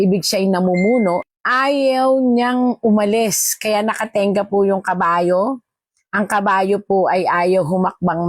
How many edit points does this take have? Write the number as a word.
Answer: one